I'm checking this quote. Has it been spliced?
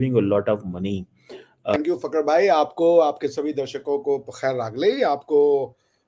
yes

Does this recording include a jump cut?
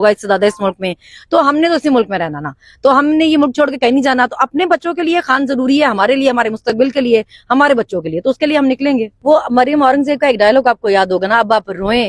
yes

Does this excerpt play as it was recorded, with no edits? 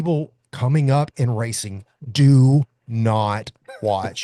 yes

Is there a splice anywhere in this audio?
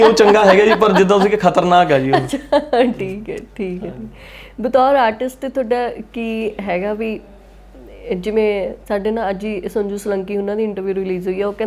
no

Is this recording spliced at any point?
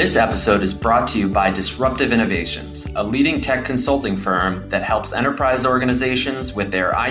no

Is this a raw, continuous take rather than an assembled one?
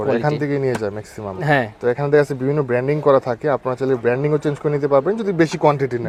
yes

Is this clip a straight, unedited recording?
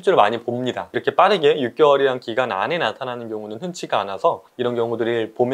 no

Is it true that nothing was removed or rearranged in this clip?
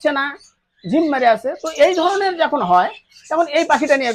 yes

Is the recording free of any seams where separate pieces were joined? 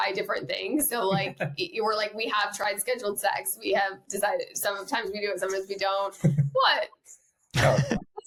yes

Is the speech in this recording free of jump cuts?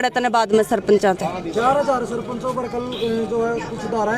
yes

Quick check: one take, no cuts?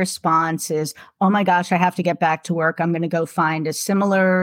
yes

